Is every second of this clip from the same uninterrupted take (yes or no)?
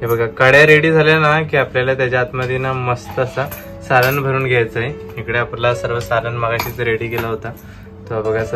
yes